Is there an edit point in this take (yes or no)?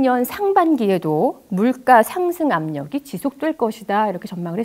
no